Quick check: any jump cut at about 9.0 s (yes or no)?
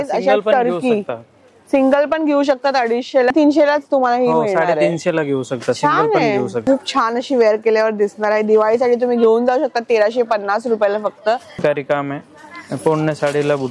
no